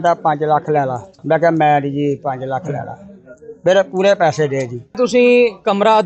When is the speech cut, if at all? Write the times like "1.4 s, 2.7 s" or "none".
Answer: 1.2 s, 5.0 s